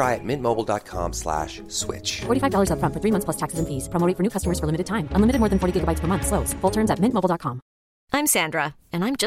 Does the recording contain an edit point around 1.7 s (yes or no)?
no